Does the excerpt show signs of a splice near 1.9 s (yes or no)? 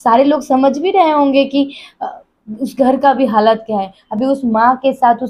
no